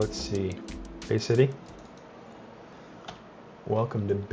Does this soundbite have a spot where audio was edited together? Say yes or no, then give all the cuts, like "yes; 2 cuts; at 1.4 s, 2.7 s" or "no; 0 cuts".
yes; 1 cut; at 2.7 s